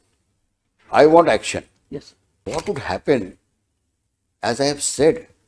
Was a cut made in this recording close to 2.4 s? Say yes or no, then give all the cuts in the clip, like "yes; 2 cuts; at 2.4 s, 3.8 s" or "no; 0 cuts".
yes; 1 cut; at 2.4 s